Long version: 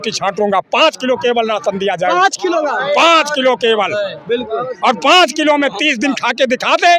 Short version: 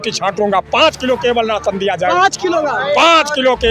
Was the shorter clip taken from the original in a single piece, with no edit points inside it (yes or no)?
yes